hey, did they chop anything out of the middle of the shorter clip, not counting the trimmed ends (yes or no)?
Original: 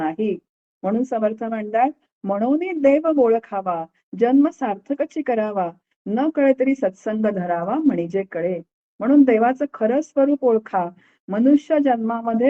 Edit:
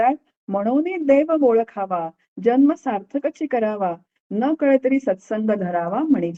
no